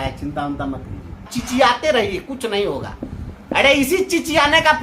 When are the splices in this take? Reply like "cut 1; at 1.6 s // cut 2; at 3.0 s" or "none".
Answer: cut 1; at 1.3 s